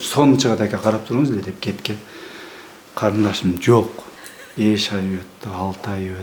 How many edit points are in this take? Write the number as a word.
zero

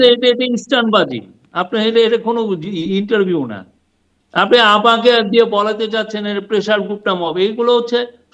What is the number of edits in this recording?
zero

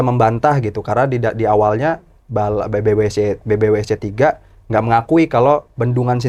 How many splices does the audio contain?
zero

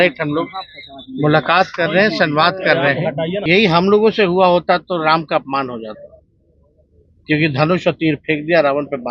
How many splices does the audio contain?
one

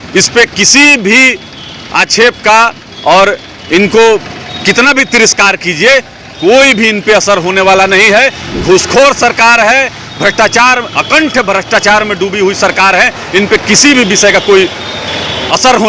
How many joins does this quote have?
zero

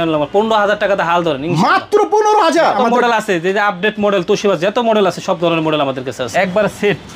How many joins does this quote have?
two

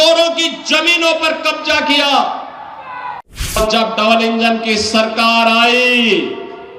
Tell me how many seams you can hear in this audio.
one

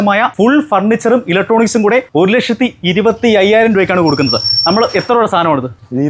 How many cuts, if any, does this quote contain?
zero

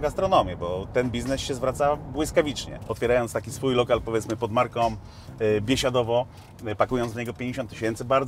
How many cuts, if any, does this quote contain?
one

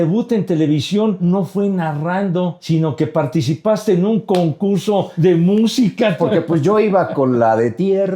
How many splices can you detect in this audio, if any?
four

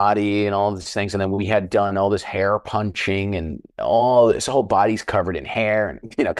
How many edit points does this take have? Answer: zero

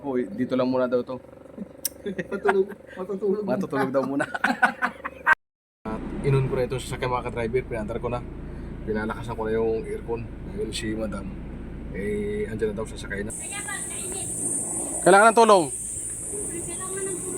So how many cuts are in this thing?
two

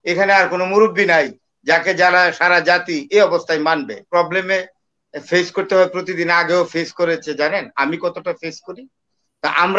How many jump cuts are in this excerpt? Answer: one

